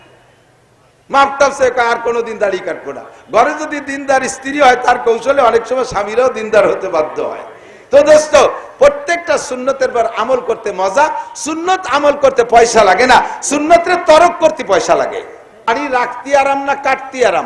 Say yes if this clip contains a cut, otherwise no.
yes